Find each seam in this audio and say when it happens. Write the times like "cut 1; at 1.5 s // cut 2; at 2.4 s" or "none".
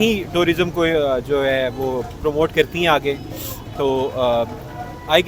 none